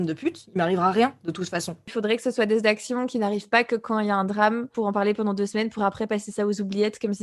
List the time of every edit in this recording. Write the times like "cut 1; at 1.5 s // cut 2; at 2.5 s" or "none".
none